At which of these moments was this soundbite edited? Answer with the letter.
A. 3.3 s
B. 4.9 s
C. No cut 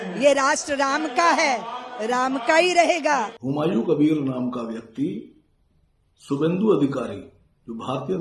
A